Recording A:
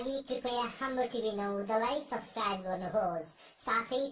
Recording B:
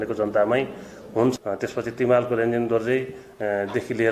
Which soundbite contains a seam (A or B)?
B